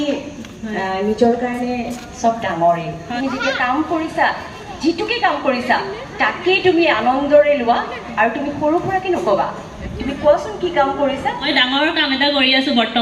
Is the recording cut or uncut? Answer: cut